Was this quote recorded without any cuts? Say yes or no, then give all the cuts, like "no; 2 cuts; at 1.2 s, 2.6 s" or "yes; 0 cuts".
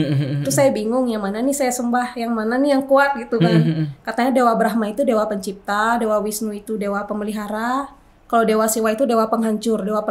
yes; 0 cuts